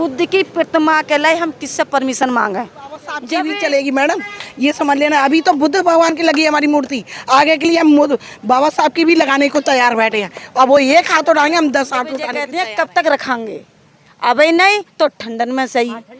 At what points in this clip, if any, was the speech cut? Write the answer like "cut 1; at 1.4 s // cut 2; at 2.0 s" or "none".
cut 1; at 3.2 s // cut 2; at 12.4 s